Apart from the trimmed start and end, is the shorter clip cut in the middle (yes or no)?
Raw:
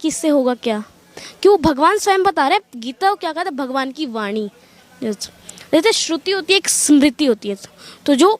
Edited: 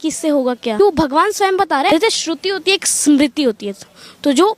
yes